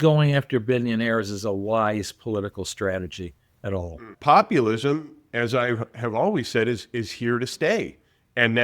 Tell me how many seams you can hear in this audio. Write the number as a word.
one